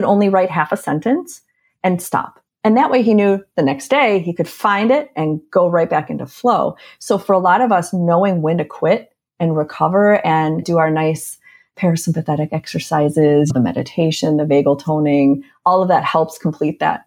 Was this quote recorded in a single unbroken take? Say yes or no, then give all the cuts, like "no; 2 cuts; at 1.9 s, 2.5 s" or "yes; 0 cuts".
no; 2 cuts; at 10.7 s, 13.5 s